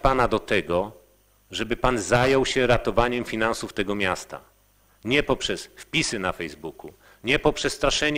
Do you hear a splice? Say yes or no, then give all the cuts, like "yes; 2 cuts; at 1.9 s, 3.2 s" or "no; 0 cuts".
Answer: no; 0 cuts